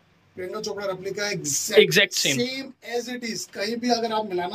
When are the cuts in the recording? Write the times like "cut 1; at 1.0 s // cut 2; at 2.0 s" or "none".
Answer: none

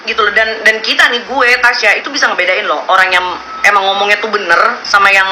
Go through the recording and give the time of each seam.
none

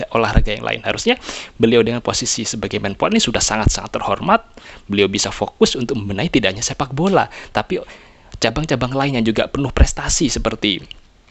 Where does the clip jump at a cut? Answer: none

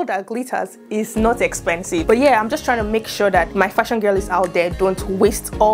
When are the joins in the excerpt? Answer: cut 1; at 2.0 s

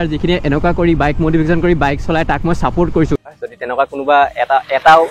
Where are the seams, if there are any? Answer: cut 1; at 3.2 s

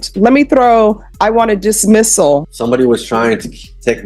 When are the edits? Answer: cut 1; at 2.4 s

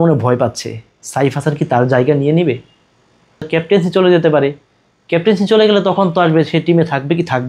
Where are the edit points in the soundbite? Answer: cut 1; at 3.5 s

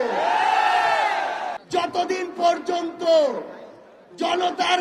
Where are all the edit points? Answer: cut 1; at 1.6 s

